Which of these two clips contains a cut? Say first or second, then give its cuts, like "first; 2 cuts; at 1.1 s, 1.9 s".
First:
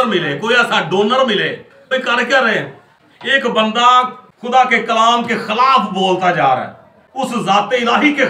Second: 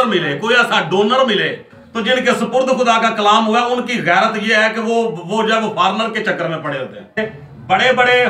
second; 2 cuts; at 1.7 s, 7.3 s